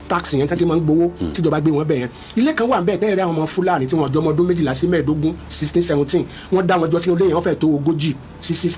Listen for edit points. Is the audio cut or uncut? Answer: uncut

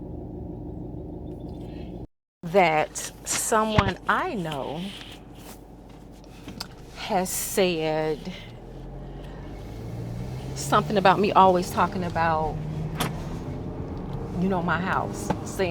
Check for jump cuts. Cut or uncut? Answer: uncut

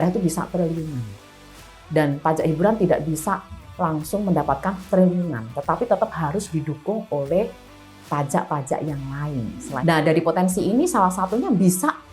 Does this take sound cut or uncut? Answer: cut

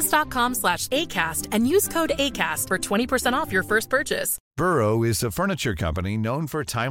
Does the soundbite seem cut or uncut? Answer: cut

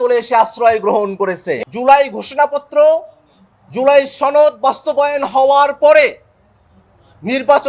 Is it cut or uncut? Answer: cut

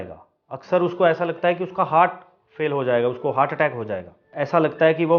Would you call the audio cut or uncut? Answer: cut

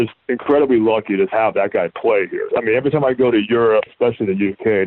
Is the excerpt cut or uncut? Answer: cut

